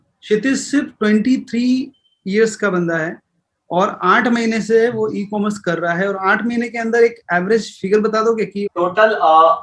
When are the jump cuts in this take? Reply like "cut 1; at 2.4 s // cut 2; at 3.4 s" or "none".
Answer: cut 1; at 8.7 s